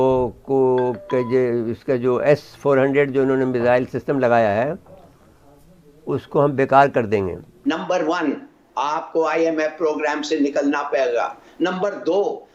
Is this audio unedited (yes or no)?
yes